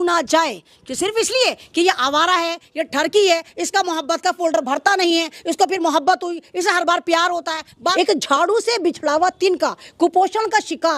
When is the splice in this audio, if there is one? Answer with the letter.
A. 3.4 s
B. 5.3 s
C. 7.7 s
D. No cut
C